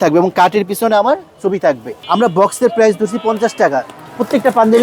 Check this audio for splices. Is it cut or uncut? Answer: cut